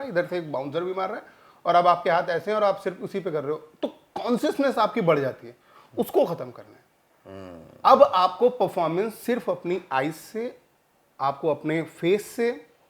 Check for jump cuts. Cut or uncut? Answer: uncut